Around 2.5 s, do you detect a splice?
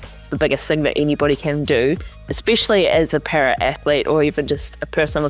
no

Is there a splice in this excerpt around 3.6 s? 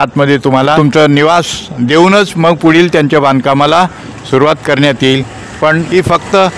no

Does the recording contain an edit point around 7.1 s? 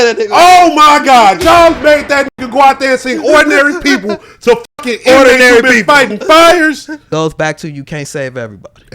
yes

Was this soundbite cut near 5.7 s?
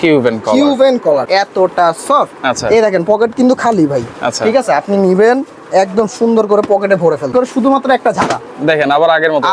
no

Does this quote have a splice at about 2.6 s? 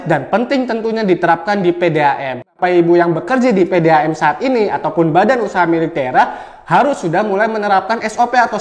yes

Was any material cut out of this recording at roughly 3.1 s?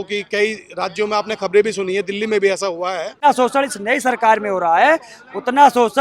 yes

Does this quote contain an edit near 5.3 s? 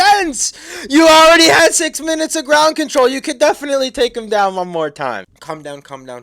yes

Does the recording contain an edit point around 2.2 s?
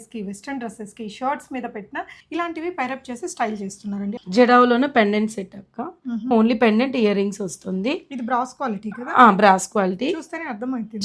yes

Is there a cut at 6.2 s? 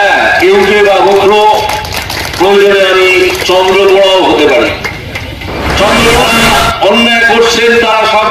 yes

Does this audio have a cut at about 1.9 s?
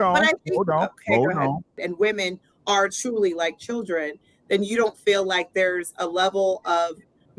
yes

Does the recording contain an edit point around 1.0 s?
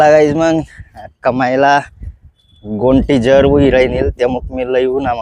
no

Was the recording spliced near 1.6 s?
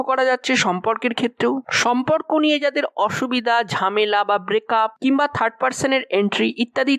no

